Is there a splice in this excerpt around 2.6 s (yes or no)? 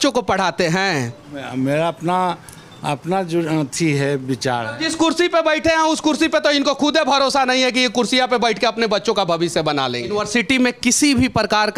no